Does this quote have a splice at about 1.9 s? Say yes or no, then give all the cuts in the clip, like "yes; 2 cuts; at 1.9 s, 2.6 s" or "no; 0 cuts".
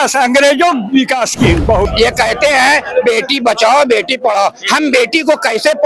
yes; 1 cut; at 1.9 s